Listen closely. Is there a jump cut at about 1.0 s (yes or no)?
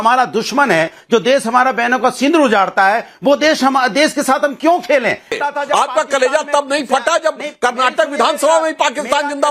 no